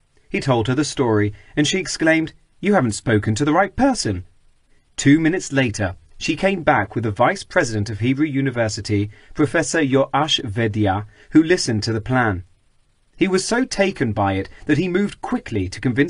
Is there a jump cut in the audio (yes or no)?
yes